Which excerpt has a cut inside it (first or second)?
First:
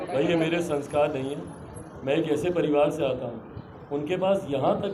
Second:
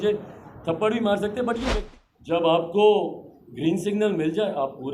second